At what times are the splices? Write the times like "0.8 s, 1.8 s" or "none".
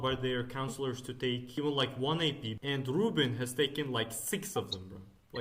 1.5 s, 2.5 s